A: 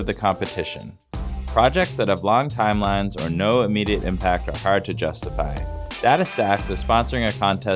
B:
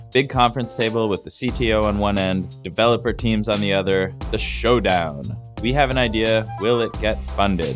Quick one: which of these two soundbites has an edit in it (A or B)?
B